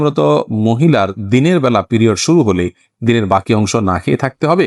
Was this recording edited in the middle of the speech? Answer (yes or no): no